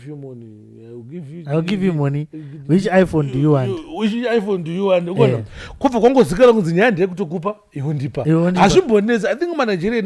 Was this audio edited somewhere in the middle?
no; 0 cuts

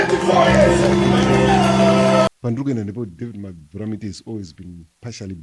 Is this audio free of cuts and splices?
no; 1 cut; at 2.3 s

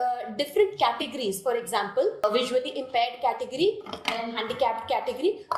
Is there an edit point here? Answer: yes; 1 cut; at 2.2 s

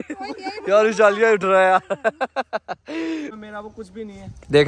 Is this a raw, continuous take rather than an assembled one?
no; 1 cut; at 3.4 s

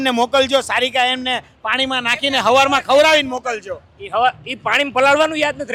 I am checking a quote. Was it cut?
no; 0 cuts

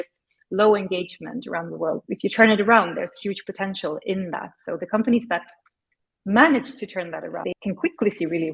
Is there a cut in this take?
yes; 2 cuts; at 2.0 s, 7.5 s

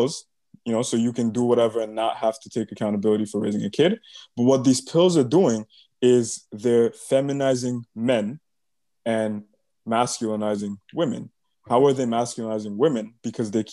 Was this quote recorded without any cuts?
yes; 0 cuts

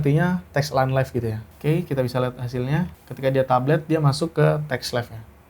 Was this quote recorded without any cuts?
no; 2 cuts; at 1.5 s, 3.0 s

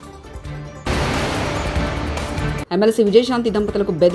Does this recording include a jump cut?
yes; 2 cuts; at 0.9 s, 2.5 s

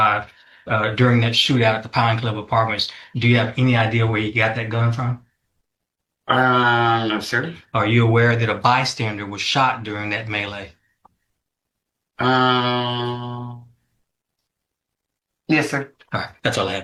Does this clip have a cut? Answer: no; 0 cuts

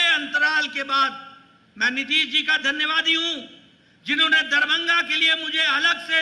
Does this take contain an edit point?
no; 0 cuts

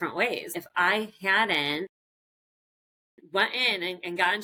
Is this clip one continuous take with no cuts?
yes; 0 cuts

